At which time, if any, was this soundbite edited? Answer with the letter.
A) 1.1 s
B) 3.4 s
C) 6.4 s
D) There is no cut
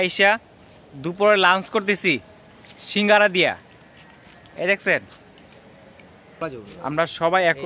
C